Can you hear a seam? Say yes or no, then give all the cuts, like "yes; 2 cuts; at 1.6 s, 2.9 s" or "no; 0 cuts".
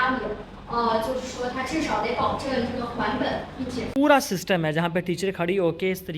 yes; 1 cut; at 3.9 s